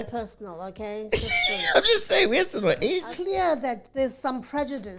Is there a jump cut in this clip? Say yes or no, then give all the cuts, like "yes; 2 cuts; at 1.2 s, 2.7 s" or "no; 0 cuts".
yes; 1 cut; at 3.0 s